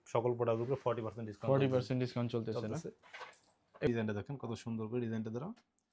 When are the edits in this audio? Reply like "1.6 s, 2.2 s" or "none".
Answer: 3.9 s